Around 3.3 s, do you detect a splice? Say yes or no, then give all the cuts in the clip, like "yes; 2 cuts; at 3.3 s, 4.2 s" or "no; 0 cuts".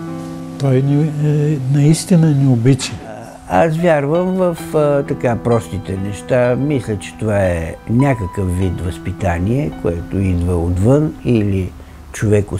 yes; 1 cut; at 3.3 s